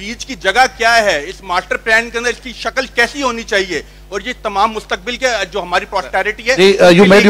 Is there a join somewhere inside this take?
no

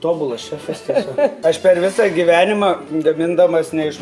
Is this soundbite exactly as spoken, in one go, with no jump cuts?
no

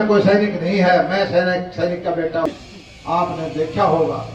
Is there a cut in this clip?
yes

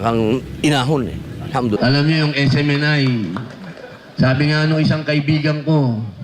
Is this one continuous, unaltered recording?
no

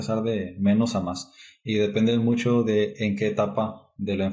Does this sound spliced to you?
no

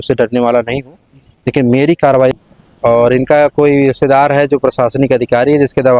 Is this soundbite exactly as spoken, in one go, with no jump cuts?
no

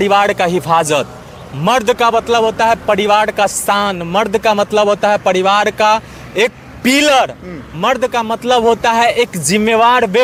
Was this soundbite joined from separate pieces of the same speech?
no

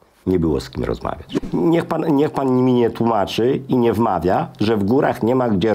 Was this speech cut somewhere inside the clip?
yes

